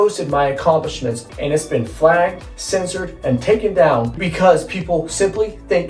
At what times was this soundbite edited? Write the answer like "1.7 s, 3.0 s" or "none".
1.1 s, 4.2 s